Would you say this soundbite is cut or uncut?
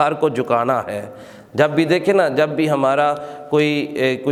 uncut